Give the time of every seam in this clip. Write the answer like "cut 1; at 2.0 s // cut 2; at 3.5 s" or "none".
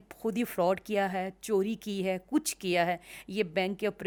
none